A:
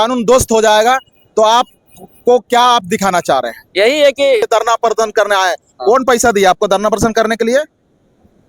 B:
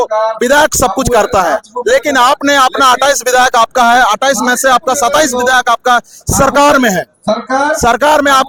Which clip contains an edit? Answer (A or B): A